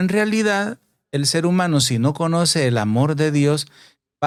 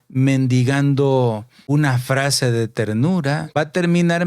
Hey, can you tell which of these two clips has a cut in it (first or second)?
second